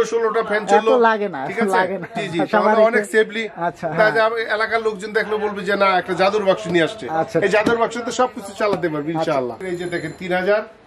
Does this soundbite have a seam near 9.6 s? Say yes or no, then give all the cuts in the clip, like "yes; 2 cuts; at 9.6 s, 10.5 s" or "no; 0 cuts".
yes; 1 cut; at 9.6 s